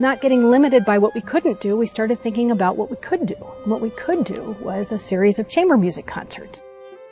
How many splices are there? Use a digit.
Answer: 0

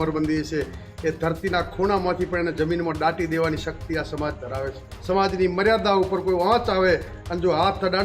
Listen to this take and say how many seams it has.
1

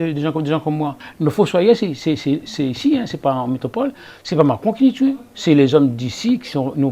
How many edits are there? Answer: 1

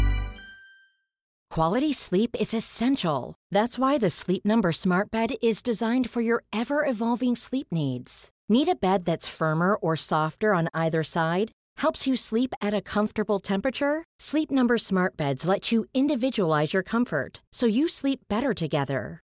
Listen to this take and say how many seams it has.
1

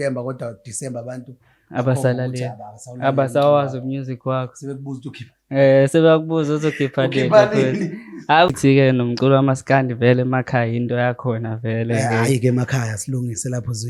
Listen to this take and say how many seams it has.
1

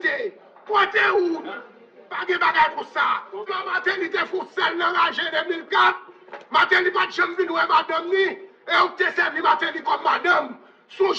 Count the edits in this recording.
1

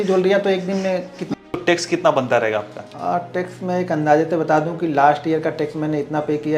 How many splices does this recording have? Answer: 2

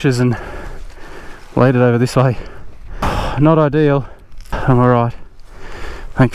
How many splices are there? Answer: 2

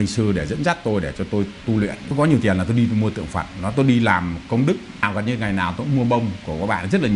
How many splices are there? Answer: 2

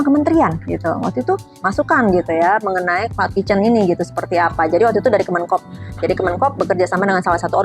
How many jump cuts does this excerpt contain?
1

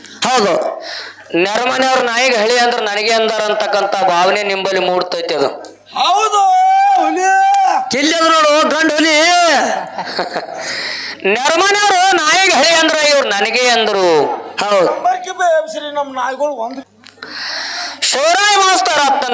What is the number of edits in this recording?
1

